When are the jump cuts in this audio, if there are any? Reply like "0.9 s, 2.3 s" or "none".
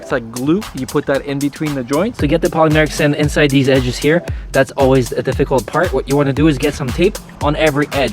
2.1 s